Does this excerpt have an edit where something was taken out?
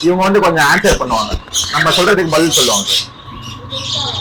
no; 0 cuts

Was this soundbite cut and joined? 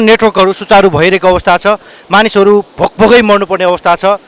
no; 0 cuts

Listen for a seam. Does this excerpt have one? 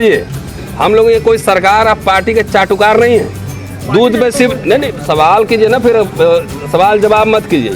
no; 0 cuts

